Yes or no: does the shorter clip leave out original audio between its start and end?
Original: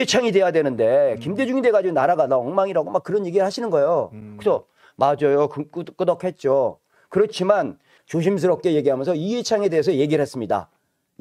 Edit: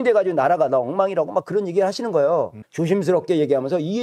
yes